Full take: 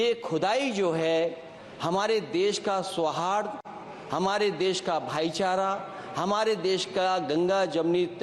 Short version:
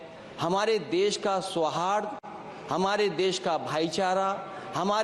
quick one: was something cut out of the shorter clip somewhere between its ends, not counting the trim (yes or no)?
no